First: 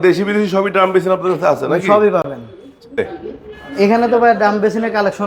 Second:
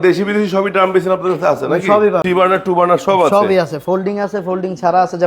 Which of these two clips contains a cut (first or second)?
second